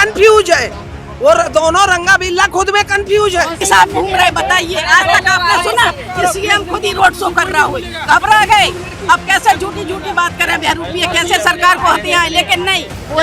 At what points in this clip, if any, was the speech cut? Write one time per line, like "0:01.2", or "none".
0:03.6